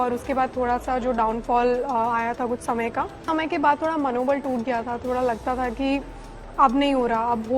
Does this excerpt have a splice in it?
yes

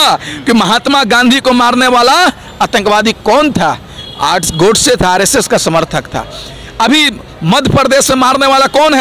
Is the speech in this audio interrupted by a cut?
no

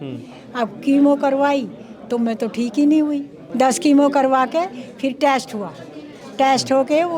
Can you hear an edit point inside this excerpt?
yes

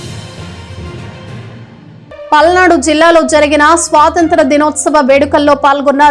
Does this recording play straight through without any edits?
yes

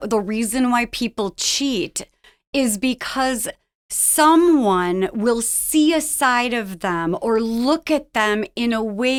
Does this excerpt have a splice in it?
no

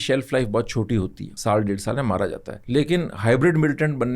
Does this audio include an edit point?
yes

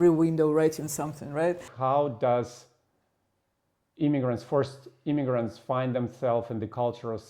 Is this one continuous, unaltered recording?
no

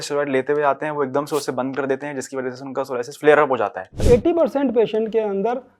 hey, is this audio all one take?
no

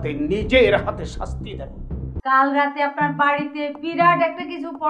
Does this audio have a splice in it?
yes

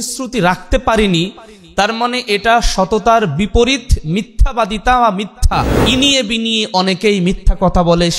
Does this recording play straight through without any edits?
no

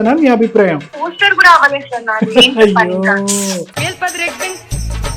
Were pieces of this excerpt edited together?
yes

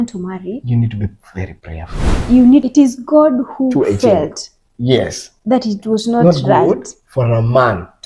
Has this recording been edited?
yes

